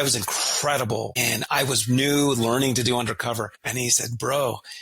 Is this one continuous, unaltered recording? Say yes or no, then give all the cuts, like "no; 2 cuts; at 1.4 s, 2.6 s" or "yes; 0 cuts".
no; 2 cuts; at 1.2 s, 3.6 s